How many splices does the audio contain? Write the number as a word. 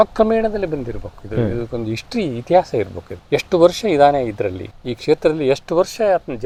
zero